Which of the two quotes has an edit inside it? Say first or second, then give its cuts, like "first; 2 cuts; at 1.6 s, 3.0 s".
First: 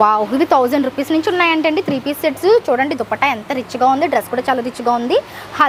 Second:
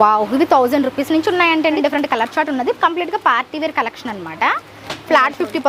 second; 1 cut; at 1.8 s